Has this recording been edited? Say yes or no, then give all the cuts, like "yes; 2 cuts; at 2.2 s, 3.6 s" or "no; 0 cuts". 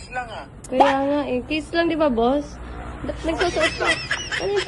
no; 0 cuts